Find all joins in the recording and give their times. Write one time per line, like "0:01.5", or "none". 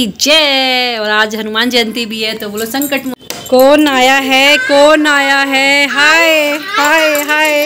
0:03.1